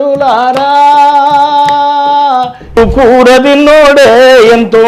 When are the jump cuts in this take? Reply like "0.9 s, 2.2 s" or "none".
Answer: 2.8 s

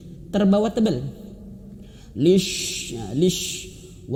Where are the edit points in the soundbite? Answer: none

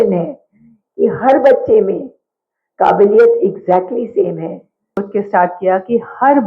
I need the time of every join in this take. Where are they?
5.1 s

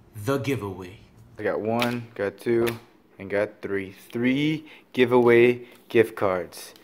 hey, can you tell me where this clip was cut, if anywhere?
none

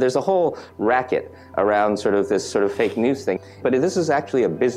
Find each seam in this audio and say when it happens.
3.5 s

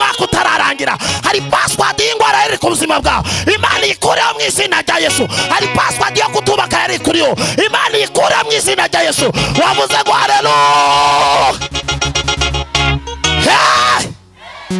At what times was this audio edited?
none

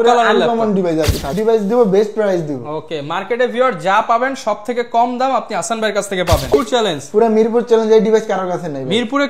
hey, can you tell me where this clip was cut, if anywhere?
1.3 s, 6.5 s

